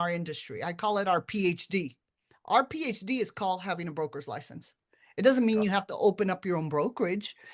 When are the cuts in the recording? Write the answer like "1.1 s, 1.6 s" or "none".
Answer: none